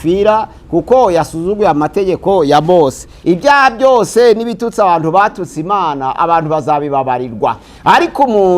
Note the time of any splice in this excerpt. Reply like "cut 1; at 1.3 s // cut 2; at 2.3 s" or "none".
cut 1; at 3.1 s // cut 2; at 7.7 s